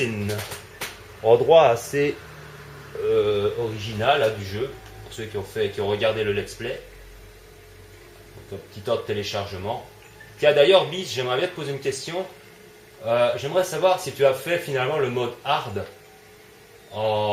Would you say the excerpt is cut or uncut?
uncut